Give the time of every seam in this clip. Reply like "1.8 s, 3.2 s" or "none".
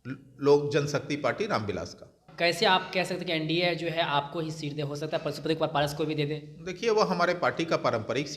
2.2 s